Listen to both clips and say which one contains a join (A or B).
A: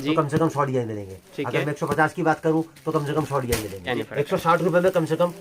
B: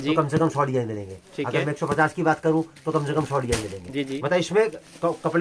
A